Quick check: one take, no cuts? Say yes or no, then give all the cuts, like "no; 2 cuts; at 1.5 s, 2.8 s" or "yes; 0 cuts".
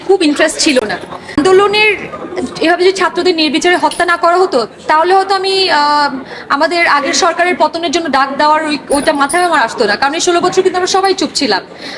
no; 1 cut; at 1.3 s